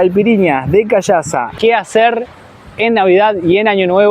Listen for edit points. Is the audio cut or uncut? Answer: cut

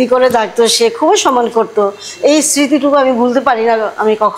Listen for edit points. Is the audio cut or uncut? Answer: uncut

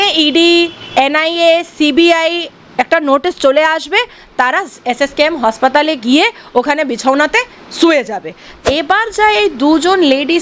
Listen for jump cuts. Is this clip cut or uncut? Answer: cut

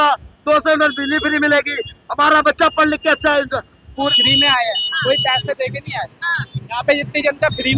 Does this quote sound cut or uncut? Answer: cut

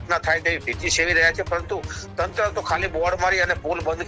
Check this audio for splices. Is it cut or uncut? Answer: uncut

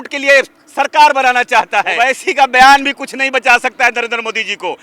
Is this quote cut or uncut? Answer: cut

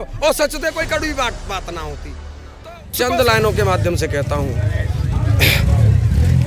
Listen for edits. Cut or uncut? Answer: cut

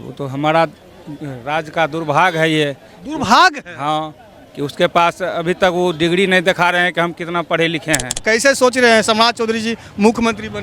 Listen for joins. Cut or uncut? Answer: cut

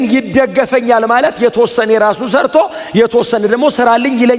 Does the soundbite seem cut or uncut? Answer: uncut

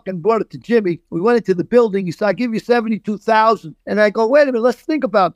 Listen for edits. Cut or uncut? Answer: cut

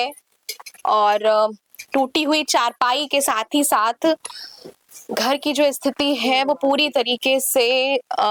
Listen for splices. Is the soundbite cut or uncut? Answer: uncut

